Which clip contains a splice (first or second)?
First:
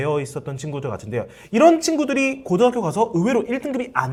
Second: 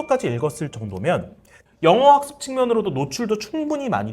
second